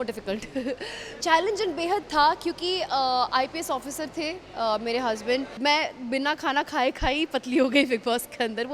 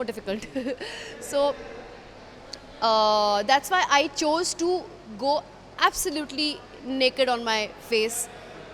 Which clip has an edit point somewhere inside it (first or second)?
first